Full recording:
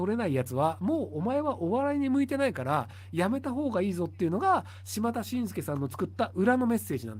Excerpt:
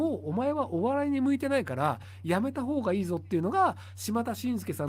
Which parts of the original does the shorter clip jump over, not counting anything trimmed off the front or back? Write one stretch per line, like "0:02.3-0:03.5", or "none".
none